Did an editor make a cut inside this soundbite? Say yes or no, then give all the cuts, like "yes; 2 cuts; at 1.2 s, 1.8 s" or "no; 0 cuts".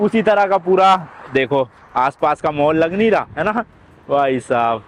no; 0 cuts